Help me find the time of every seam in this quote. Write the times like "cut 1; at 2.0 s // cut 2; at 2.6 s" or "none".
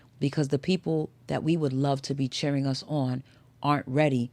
none